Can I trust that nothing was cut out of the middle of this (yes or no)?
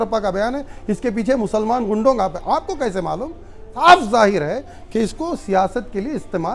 no